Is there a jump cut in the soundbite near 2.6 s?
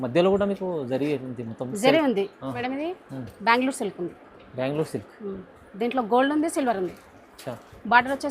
yes; 1 cut; at 2.6 s

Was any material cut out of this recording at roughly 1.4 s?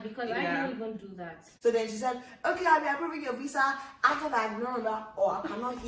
yes; 1 cut; at 1.4 s

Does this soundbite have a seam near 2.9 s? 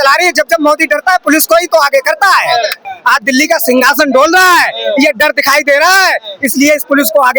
yes; 1 cut; at 2.9 s

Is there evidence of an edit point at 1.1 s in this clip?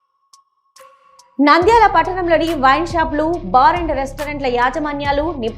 yes; 1 cut; at 1.1 s

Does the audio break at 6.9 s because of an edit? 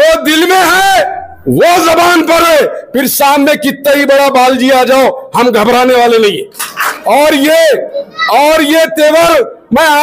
yes; 1 cut; at 6.9 s

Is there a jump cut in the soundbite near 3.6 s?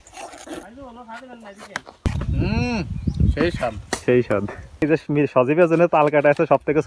no; 1 cut; at 4.8 s

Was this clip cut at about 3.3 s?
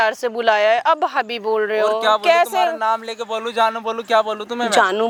no; 0 cuts

